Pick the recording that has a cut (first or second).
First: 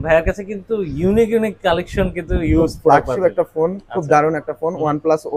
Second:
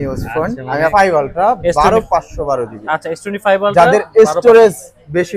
second